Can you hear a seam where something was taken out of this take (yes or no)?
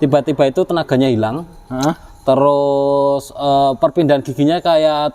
no